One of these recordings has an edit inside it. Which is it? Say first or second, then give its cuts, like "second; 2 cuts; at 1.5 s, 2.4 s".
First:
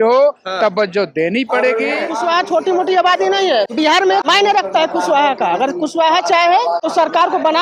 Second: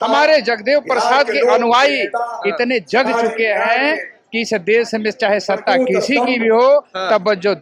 first; 3 cuts; at 2.1 s, 4.0 s, 6.8 s